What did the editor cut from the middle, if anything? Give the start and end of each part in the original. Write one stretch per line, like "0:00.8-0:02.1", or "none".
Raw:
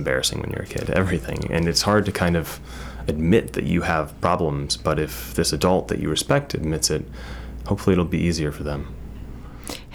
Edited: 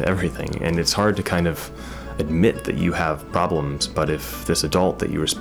none

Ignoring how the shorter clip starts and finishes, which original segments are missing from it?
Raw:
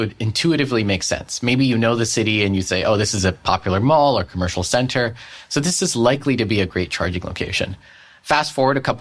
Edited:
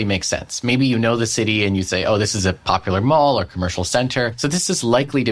0:05.1-0:05.5

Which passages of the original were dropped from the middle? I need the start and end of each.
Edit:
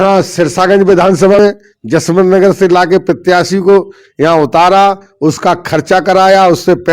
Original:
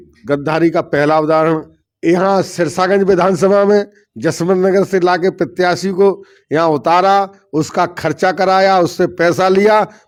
0:03.6-0:03.7

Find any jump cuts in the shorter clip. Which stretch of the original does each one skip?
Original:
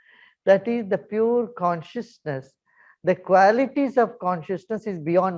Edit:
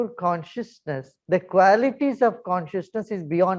0:02.5-0:02.9

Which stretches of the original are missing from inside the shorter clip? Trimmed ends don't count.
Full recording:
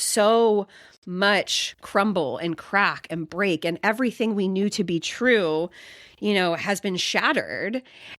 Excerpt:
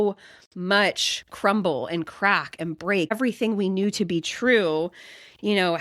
0:03.6-0:03.9

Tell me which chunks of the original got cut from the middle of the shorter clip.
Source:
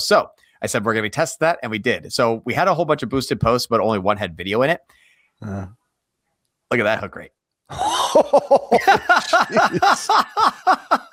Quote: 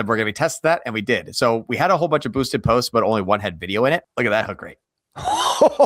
0:04.8-0:06.6

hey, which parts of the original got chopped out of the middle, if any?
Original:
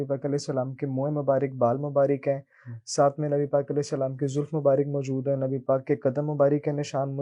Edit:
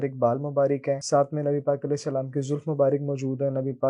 0:02.4-0:02.9

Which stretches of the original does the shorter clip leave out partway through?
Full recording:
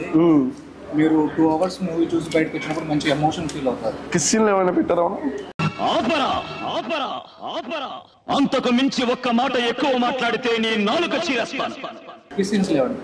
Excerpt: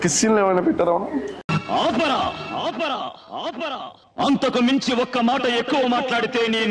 none

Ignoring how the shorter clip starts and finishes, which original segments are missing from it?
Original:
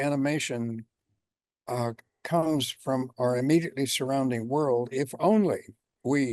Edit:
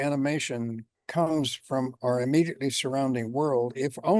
0:01.0-0:02.1

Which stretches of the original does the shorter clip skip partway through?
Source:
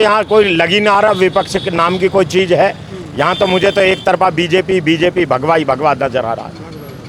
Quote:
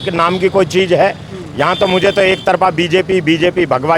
none

